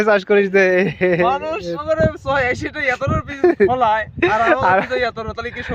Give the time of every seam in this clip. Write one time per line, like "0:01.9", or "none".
0:01.8